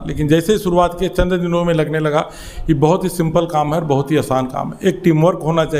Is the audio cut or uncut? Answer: uncut